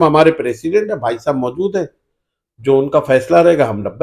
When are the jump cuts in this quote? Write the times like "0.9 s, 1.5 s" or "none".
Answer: none